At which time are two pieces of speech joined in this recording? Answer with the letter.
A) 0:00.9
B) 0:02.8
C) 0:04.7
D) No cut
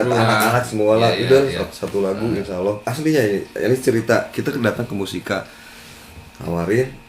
B